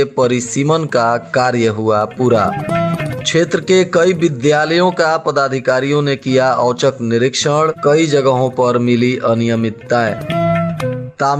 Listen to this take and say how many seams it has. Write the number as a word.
zero